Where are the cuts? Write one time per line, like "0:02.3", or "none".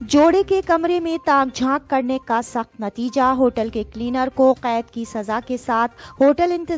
none

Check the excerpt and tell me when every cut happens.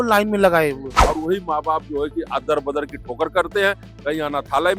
0:00.9

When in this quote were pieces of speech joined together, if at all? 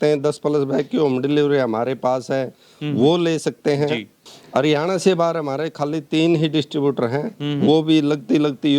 0:04.2

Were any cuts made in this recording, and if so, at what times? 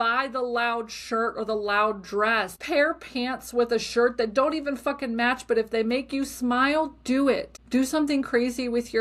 0:02.6
0:07.5

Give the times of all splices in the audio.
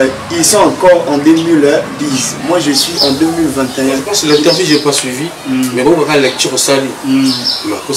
0:04.1

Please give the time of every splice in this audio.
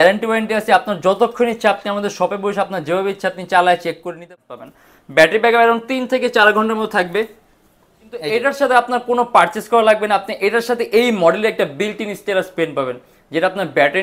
0:04.3
0:08.3

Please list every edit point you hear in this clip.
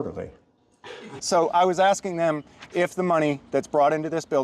0:01.2

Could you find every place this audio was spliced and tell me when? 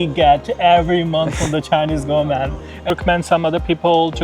0:02.9

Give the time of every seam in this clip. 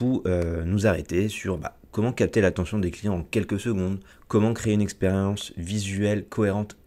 0:04.1

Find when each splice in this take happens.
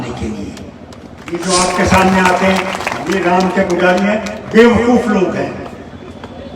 0:01.4

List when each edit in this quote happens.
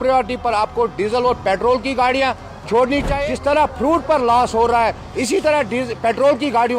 0:03.1

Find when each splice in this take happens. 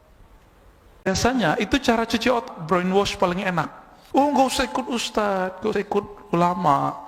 0:01.1

